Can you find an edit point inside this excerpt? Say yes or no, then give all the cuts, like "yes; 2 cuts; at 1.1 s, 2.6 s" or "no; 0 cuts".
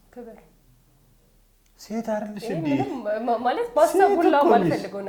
no; 0 cuts